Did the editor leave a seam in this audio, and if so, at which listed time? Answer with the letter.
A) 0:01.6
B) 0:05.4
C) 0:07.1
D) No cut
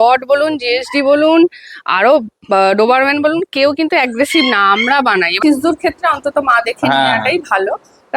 B